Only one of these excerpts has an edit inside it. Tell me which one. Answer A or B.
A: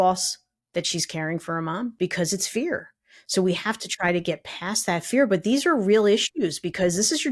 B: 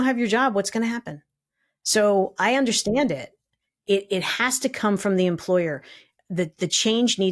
A